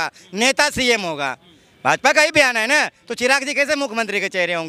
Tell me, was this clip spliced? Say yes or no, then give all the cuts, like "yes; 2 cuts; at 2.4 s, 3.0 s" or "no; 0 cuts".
no; 0 cuts